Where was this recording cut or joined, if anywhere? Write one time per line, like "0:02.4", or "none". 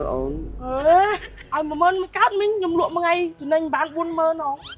none